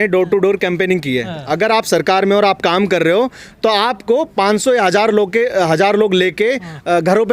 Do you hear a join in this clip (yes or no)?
no